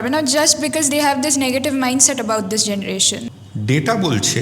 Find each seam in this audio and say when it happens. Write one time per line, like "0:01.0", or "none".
0:03.4